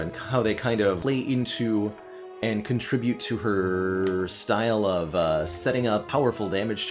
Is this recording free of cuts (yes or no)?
no